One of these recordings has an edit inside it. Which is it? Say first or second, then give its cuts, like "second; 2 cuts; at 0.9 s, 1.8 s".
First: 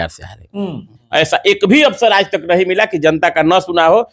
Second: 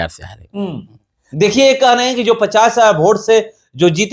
first; 1 cut; at 1.0 s